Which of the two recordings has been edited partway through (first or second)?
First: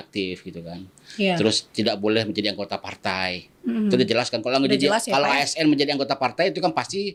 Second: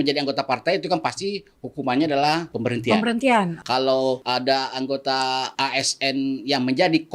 second